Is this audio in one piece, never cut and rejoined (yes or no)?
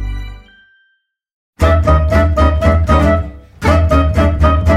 no